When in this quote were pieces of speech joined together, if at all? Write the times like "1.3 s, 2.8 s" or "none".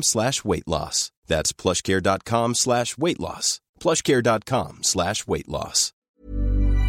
6.0 s